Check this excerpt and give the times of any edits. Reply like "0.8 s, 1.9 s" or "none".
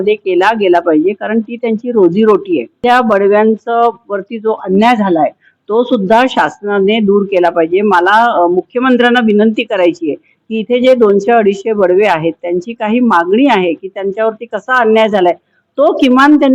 2.8 s